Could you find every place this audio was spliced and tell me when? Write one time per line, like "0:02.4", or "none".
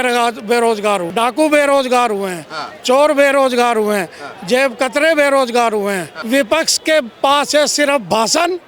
0:01.1
0:06.1